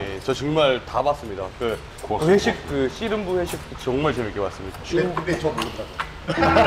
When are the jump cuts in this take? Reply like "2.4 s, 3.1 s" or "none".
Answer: 1.9 s, 4.8 s